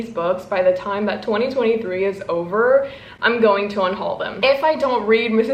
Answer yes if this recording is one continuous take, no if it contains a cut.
no